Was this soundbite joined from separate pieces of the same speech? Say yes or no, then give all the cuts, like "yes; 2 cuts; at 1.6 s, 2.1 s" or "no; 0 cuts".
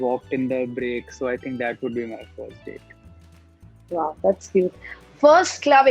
no; 0 cuts